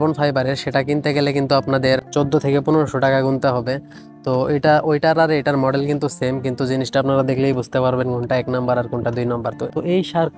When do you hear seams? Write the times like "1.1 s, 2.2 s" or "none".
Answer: none